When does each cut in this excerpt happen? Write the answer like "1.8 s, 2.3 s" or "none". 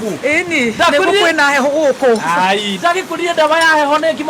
none